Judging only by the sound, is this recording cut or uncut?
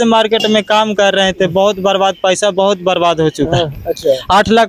uncut